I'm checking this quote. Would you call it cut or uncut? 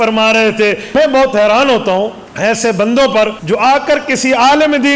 cut